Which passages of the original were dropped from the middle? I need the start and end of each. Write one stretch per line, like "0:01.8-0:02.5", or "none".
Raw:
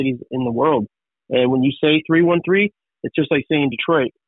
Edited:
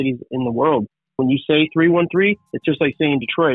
0:01.2-0:01.5
0:02.8-0:03.0

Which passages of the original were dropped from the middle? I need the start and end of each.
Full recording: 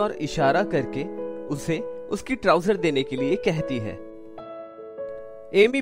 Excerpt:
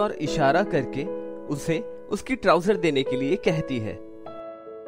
0:03.9-0:04.1

